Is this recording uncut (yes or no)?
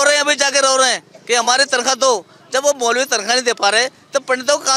yes